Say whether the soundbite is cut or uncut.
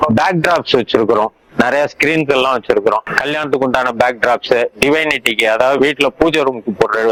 uncut